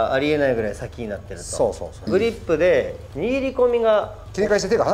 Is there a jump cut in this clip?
yes; 1 cut; at 2.0 s

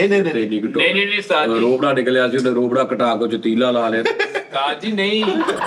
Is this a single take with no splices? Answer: yes; 0 cuts

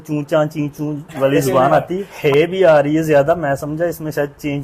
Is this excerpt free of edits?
no; 1 cut; at 2.1 s

